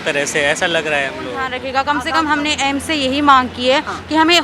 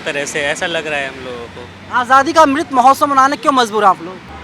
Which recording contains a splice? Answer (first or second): first